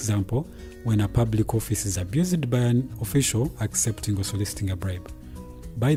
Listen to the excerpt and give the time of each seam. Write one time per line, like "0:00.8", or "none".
none